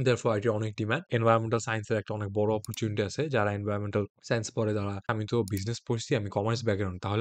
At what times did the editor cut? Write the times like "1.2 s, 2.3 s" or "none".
1.1 s, 5.1 s

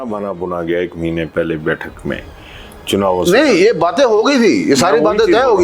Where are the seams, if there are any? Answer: none

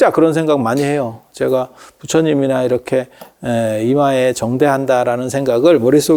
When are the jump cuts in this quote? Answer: none

